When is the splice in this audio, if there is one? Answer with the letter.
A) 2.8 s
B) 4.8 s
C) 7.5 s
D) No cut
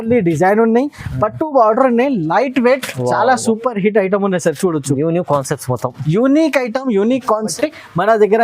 C